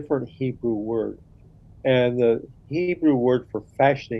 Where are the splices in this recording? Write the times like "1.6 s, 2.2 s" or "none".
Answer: none